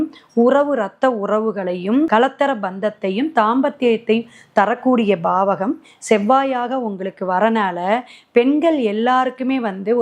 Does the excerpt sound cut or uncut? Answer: uncut